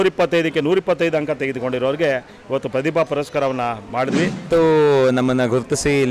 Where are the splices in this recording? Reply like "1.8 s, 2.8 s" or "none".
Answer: 4.4 s